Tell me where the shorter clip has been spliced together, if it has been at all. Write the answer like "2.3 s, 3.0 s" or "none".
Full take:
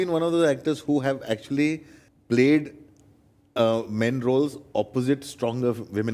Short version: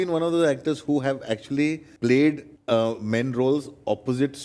1.9 s, 2.5 s